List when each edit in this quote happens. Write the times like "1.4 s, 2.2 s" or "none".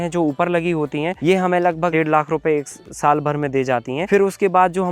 1.2 s, 1.9 s, 4.0 s